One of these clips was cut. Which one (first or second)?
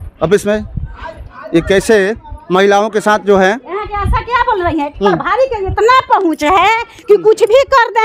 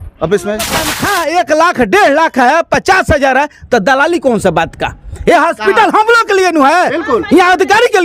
second